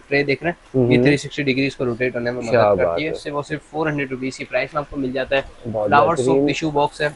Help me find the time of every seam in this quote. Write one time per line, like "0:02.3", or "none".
none